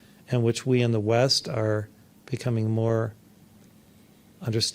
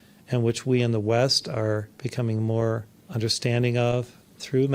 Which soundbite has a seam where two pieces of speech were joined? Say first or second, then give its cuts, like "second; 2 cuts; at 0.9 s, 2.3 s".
second; 2 cuts; at 2.0 s, 3.0 s